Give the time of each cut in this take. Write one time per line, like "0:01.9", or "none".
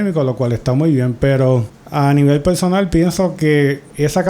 0:01.8